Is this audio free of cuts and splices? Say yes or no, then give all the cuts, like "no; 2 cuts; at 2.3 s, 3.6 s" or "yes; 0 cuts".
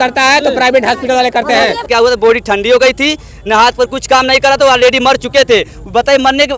no; 1 cut; at 1.9 s